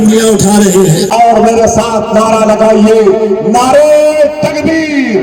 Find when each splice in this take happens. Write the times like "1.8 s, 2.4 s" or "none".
1.1 s